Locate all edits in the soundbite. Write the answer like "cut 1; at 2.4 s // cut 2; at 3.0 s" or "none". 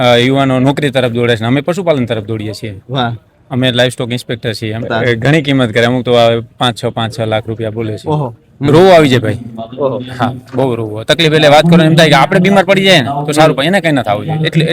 cut 1; at 4.9 s // cut 2; at 8.7 s